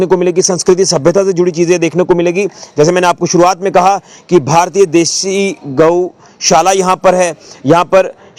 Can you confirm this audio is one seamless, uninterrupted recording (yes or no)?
yes